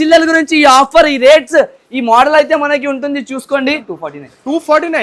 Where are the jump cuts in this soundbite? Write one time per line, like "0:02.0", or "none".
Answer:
0:03.9